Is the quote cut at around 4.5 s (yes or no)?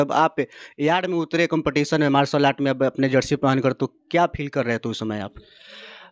no